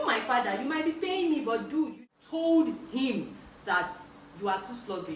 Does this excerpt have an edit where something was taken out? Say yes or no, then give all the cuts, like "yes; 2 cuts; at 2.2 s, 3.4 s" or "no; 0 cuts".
yes; 1 cut; at 2.0 s